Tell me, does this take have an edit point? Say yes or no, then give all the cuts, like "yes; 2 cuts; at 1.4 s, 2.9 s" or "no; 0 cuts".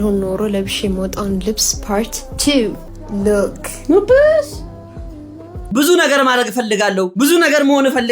yes; 2 cuts; at 2.9 s, 5.7 s